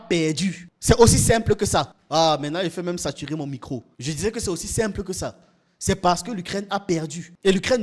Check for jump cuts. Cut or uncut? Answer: uncut